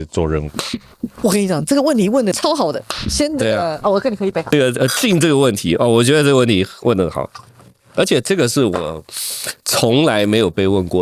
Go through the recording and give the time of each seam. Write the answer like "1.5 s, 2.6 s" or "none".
2.4 s, 4.5 s